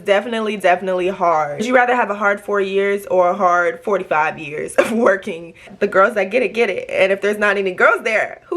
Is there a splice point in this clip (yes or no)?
yes